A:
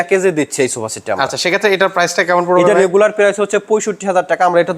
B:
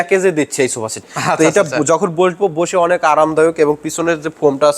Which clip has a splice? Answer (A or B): B